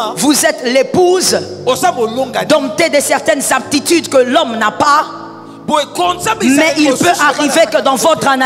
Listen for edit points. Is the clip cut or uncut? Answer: uncut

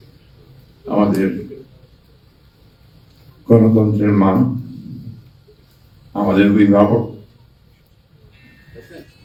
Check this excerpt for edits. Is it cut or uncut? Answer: uncut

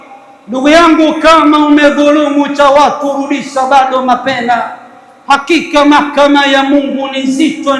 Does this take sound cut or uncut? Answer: uncut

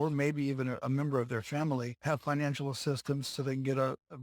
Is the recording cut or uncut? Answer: cut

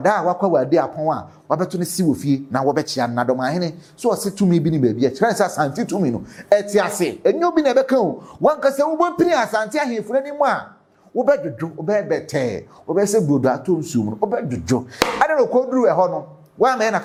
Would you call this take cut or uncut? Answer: uncut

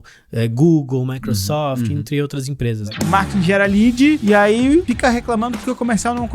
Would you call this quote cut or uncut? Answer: cut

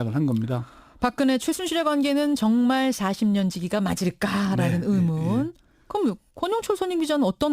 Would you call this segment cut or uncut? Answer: cut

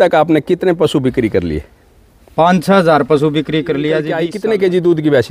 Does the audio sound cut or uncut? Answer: cut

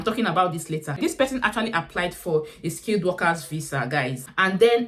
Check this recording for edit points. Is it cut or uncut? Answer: cut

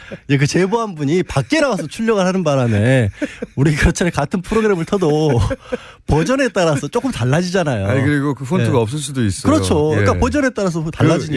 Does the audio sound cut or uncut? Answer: uncut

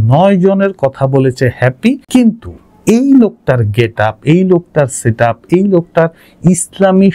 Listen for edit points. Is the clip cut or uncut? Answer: cut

